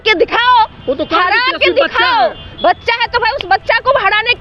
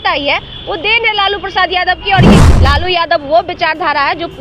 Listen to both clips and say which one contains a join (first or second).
second